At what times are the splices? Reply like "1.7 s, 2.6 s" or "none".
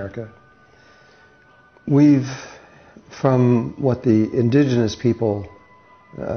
5.3 s